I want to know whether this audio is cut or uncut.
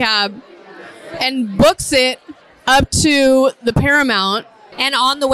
uncut